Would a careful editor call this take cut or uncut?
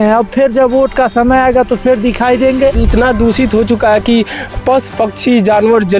cut